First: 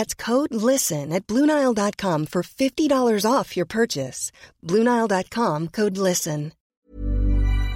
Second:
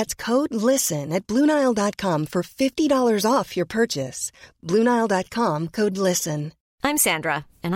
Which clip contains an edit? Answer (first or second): first